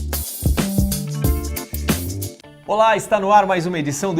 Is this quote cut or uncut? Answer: cut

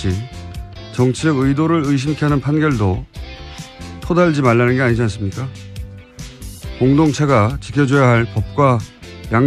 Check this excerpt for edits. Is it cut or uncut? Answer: cut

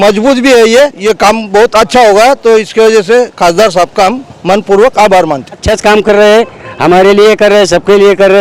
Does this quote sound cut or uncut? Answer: cut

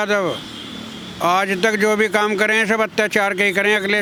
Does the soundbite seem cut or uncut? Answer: uncut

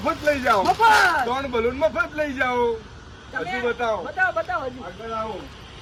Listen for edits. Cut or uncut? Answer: uncut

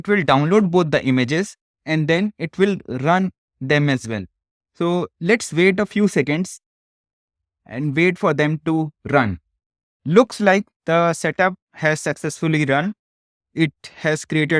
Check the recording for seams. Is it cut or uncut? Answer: uncut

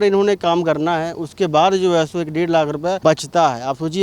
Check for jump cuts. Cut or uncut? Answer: cut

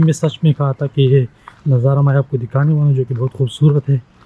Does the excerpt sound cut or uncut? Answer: uncut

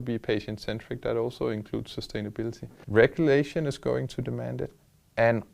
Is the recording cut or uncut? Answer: cut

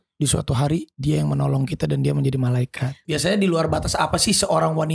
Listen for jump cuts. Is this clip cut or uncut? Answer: cut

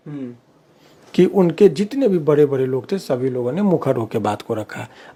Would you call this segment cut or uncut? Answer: uncut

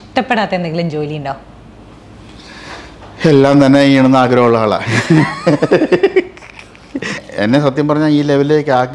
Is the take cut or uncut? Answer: cut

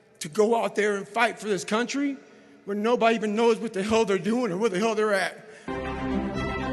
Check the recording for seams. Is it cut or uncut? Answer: cut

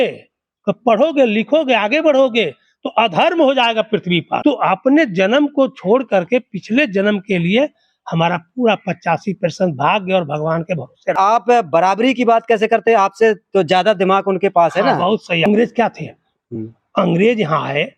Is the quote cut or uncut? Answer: cut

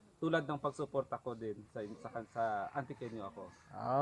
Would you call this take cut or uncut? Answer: uncut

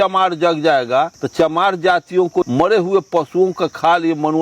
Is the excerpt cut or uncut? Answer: cut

